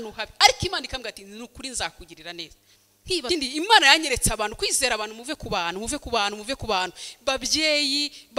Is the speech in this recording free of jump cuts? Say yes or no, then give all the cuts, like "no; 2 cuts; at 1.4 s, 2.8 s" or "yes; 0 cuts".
no; 1 cut; at 3.2 s